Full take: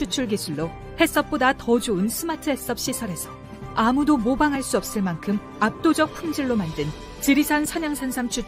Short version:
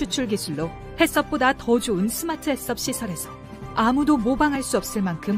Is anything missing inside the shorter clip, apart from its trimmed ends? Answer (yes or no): no